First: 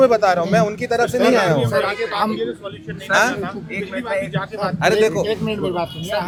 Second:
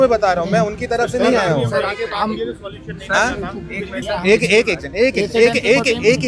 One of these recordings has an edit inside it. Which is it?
second; 1 cut; at 4.0 s

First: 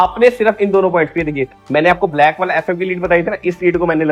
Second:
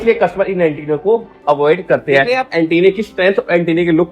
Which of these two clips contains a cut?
second; 1 cut; at 2.4 s

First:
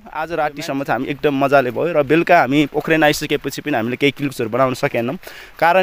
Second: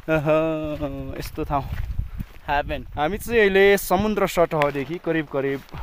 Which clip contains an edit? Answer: second; 1 cut; at 2.9 s

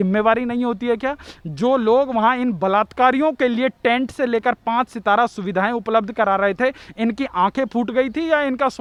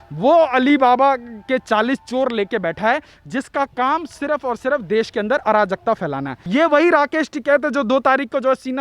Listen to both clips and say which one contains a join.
second; 1 cut; at 6.4 s

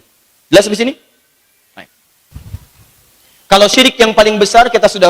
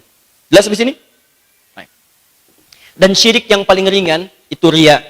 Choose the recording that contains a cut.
first; 1 cut; at 2.3 s

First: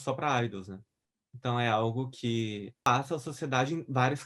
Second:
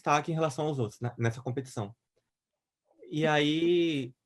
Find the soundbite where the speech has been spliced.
first; 1 cut; at 2.8 s

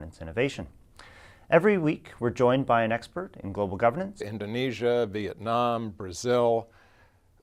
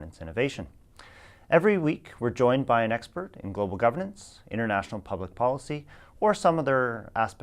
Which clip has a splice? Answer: second; 1 cut; at 4.3 s

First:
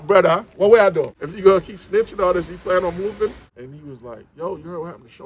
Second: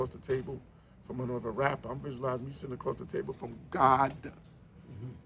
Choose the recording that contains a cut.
first; 2 cuts; at 1.2 s, 3.5 s

